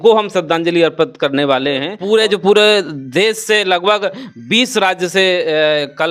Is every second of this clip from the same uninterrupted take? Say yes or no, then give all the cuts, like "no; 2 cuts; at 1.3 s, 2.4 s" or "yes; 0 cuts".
no; 1 cut; at 1.9 s